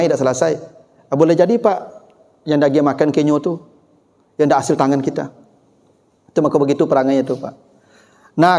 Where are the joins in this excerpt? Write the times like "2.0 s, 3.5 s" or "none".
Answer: none